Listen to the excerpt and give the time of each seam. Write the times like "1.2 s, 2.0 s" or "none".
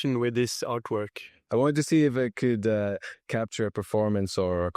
1.3 s